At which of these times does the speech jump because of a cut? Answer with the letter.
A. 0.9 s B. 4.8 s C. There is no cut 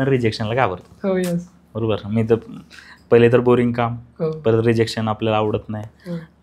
C